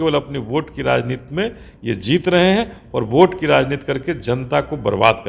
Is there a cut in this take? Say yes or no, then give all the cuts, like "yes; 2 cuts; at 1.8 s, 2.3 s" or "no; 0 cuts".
no; 0 cuts